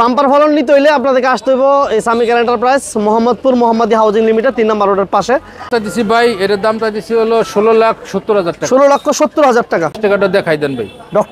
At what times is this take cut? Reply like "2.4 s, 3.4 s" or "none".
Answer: 5.7 s, 10.0 s